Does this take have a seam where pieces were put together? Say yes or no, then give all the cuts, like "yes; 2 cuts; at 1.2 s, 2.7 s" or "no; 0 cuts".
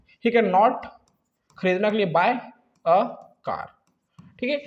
no; 0 cuts